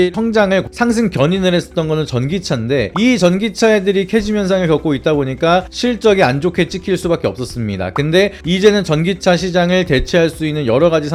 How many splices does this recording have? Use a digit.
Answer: 0